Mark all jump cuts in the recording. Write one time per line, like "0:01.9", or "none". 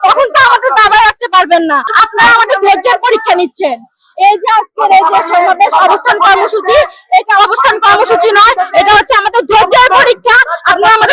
none